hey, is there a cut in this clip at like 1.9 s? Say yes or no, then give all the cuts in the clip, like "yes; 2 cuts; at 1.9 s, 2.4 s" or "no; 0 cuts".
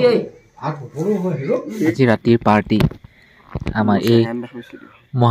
yes; 1 cut; at 1.9 s